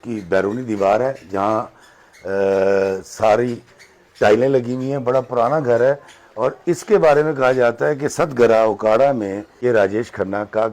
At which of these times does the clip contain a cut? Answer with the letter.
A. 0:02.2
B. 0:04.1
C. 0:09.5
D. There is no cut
C